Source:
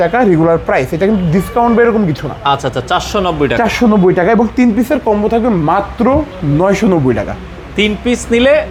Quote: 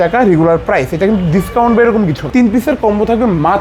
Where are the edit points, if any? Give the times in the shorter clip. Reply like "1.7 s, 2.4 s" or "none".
2.3 s